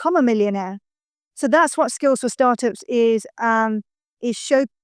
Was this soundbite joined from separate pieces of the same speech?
no; 0 cuts

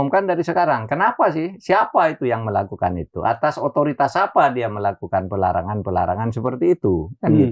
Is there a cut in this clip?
no; 0 cuts

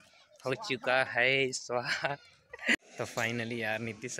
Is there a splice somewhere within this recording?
yes; 1 cut; at 2.8 s

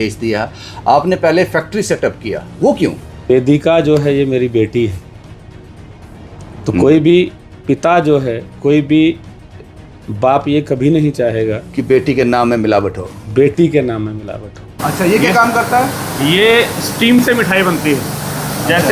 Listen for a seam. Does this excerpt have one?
yes; 2 cuts; at 3.3 s, 14.8 s

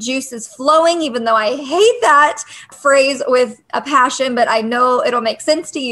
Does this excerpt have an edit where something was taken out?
yes; 1 cut; at 2.6 s

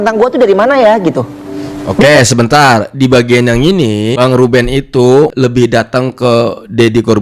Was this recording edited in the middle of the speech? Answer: no; 0 cuts

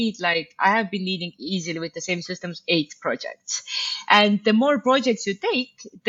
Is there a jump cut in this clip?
no; 0 cuts

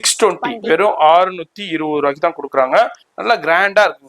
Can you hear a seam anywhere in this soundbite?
yes; 1 cut; at 3.1 s

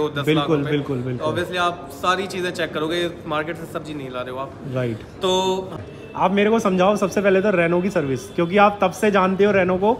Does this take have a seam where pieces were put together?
yes; 1 cut; at 5.7 s

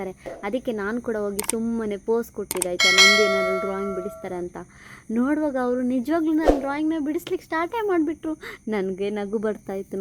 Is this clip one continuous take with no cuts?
yes; 0 cuts

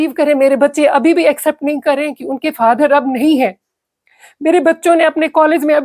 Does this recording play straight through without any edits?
yes; 0 cuts

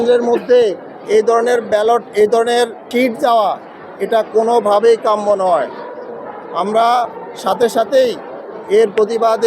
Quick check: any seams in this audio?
yes; 1 cut; at 2.8 s

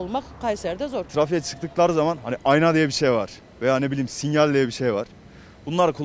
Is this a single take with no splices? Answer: no; 1 cut; at 1.1 s

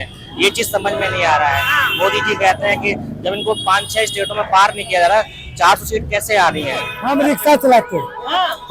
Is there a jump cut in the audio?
yes; 1 cut; at 7.0 s

